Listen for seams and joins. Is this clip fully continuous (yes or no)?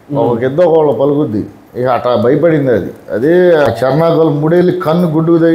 no